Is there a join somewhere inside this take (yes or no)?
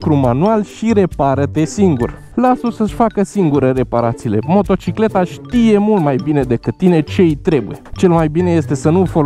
yes